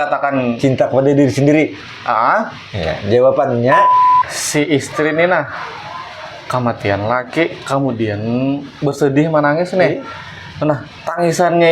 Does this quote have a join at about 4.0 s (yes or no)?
yes